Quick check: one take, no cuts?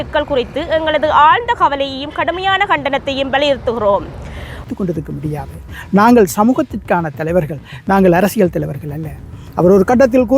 no; 1 cut; at 4.6 s

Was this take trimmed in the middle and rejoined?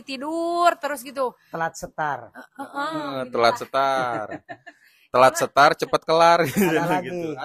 no; 0 cuts

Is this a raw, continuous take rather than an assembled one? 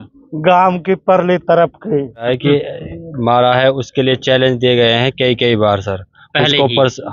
no; 1 cut; at 2.3 s

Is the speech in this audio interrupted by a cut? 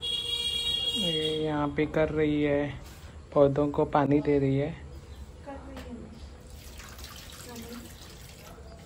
no; 0 cuts

